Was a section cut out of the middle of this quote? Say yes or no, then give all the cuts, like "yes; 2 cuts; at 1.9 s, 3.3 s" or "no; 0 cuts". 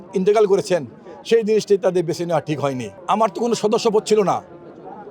yes; 1 cut; at 2.9 s